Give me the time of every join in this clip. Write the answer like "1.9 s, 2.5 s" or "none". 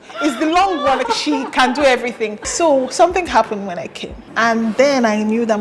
1.0 s, 2.4 s, 4.2 s